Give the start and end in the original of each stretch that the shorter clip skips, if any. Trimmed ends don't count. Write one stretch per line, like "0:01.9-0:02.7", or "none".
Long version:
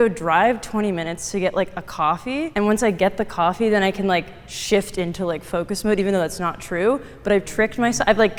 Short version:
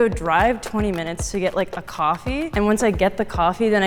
none